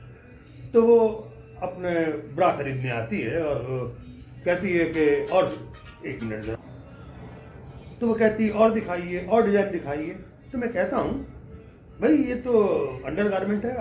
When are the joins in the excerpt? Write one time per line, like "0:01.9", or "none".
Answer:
0:06.6